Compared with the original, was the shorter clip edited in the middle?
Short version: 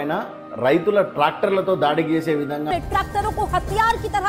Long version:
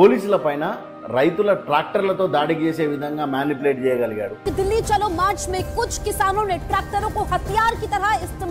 yes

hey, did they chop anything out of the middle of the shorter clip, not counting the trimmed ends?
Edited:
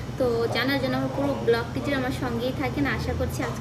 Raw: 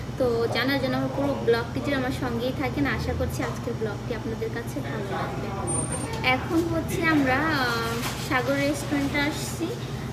no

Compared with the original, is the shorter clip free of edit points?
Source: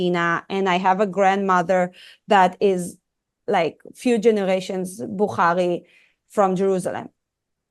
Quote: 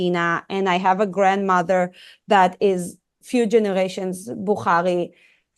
no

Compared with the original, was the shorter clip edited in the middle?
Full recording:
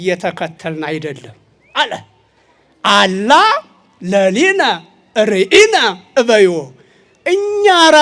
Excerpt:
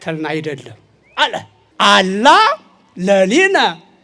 yes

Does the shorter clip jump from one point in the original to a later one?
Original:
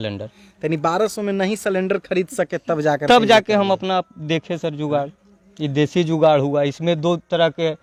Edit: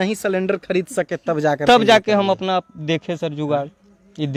no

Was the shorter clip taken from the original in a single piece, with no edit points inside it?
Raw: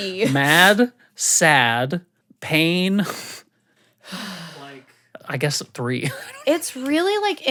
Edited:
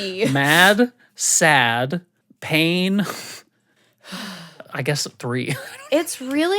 no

